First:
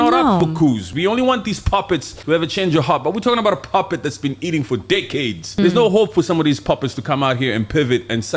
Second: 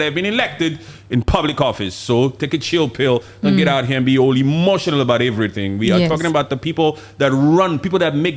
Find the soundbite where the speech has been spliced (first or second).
first